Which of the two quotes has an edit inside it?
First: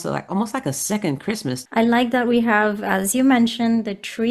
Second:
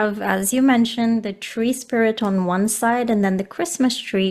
first; 1 cut; at 1.6 s

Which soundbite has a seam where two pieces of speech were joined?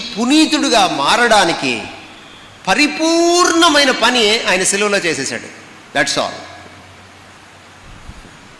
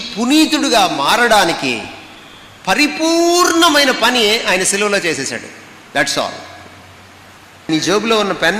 second; 1 cut; at 7.7 s

